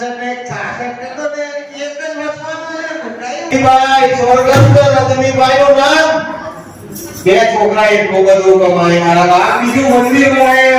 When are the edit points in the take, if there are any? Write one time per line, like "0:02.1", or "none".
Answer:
0:03.5